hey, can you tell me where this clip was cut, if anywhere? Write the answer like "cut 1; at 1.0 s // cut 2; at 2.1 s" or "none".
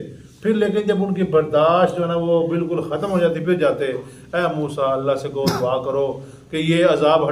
none